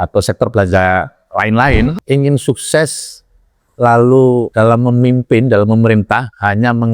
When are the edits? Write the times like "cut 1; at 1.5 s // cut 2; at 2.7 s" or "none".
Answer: cut 1; at 2.0 s // cut 2; at 4.5 s